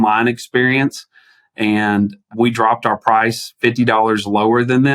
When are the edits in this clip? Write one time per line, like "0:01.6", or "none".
none